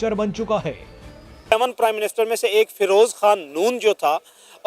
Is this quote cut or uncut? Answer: cut